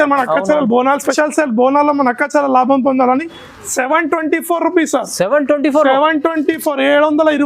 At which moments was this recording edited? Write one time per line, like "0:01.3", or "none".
0:01.1